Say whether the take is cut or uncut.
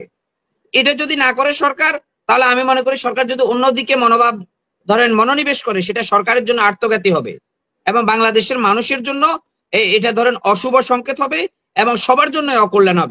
uncut